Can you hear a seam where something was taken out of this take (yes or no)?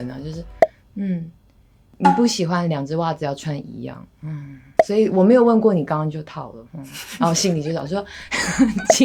no